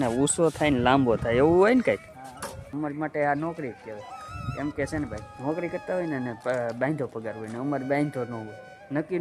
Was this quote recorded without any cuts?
no; 2 cuts; at 2.7 s, 5.3 s

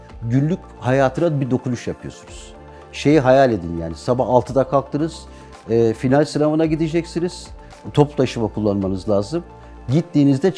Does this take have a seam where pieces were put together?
no; 0 cuts

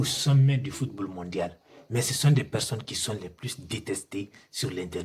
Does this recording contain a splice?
no; 0 cuts

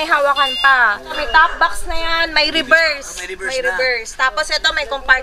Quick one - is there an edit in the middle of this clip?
yes; 1 cut; at 1.2 s

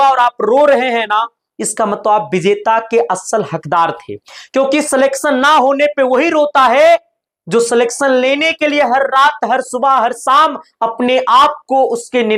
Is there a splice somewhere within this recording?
no; 0 cuts

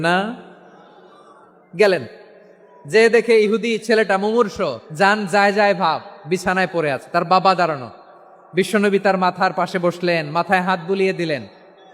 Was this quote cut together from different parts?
yes; 1 cut; at 4.8 s

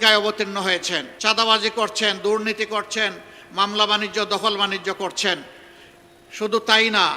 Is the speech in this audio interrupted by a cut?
yes; 1 cut; at 1.1 s

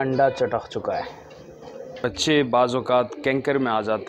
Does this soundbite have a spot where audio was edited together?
yes; 1 cut; at 2.1 s

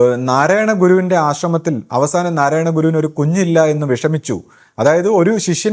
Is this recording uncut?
yes; 0 cuts

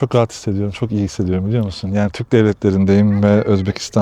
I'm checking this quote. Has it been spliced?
no; 0 cuts

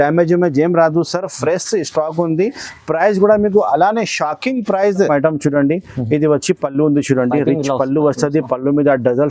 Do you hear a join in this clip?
yes; 1 cut; at 5.1 s

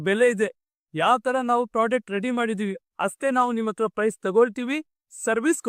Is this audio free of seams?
yes; 0 cuts

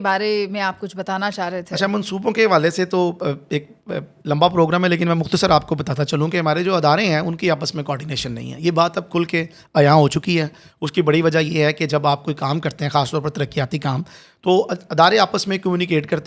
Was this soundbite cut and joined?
no; 0 cuts

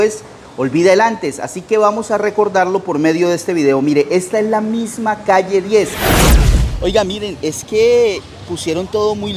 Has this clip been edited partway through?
yes; 1 cut; at 6.2 s

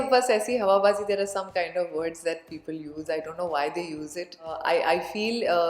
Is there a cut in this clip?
yes; 1 cut; at 4.6 s

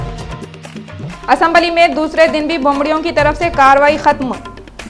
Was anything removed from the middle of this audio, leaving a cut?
no; 0 cuts

